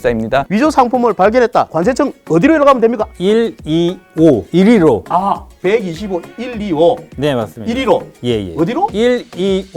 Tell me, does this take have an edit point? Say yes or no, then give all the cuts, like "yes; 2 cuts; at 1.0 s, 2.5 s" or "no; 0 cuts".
yes; 1 cut; at 5.0 s